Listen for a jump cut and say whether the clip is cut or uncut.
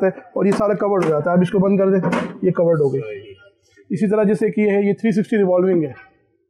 uncut